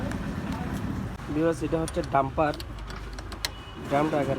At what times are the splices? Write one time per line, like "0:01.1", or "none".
0:01.2